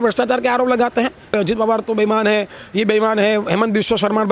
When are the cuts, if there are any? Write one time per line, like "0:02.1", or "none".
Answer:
0:01.3

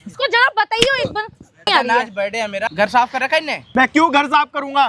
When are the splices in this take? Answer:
0:01.7
0:02.7
0:03.6

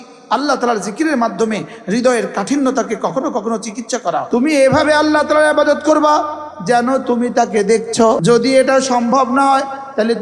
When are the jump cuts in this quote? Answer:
0:04.2
0:08.2

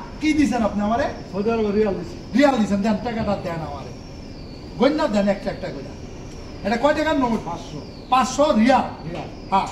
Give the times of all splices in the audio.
none

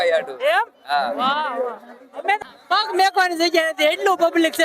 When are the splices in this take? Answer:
0:02.4

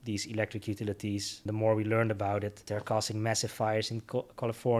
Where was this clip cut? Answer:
0:01.4
0:02.6

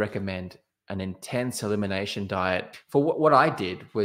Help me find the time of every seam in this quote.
0:02.8

